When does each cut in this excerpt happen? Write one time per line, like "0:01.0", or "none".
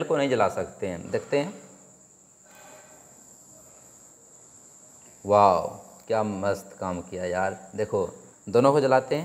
none